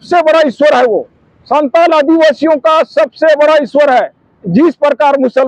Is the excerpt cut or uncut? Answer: uncut